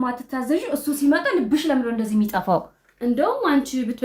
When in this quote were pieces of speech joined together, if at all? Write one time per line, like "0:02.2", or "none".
none

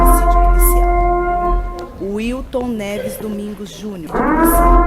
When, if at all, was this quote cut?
0:01.8
0:03.6

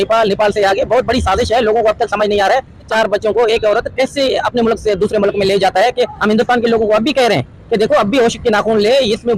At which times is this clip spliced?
0:02.9
0:06.2

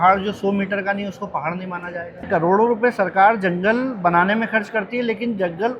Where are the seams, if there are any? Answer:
0:02.2

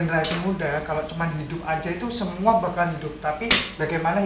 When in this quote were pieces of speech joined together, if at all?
none

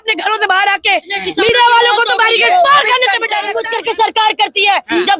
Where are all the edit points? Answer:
0:03.6

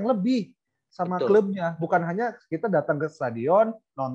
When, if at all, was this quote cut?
none

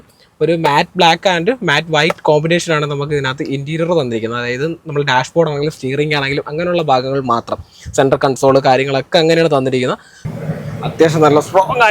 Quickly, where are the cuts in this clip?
0:10.1

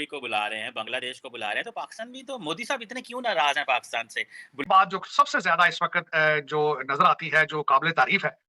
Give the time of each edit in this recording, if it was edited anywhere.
0:04.6

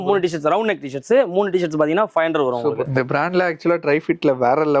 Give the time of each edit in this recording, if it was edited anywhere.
0:02.9

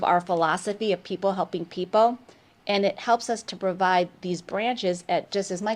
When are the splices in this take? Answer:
none

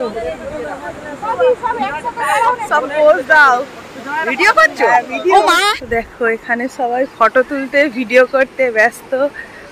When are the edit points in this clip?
0:05.7

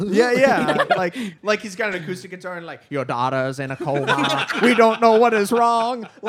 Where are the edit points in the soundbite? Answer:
none

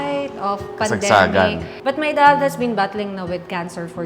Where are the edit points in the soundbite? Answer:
0:01.7

